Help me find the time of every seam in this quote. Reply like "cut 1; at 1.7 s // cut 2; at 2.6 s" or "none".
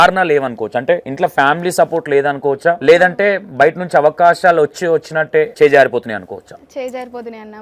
cut 1; at 1.1 s // cut 2; at 2.8 s // cut 3; at 5.5 s